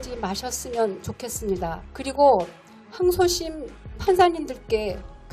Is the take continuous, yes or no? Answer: no